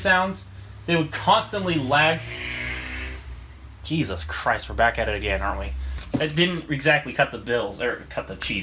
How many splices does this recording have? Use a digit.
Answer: 1